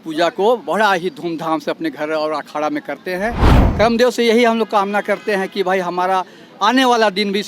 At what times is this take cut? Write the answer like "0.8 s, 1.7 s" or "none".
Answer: 3.6 s